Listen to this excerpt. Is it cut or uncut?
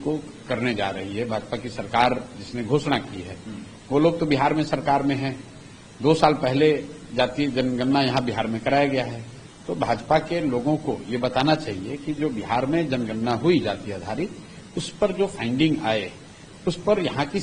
uncut